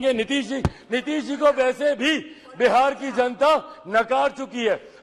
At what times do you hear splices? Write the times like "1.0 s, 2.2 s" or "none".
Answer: none

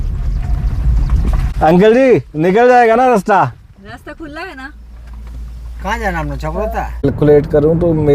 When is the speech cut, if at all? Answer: 1.5 s, 7.0 s

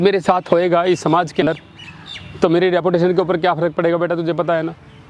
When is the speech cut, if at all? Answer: 1.4 s

